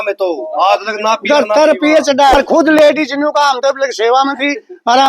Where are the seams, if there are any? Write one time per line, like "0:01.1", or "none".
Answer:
0:02.3